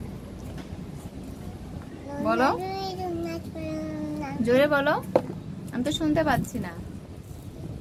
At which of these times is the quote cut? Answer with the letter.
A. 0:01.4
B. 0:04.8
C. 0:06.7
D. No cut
D